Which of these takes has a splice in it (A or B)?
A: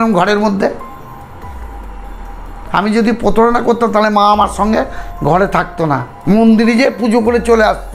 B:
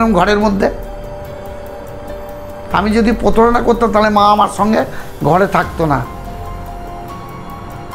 A